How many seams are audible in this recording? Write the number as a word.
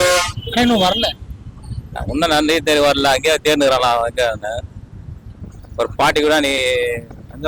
zero